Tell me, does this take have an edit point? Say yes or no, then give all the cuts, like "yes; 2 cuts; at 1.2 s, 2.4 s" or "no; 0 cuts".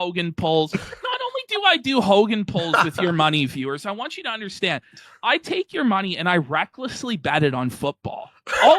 no; 0 cuts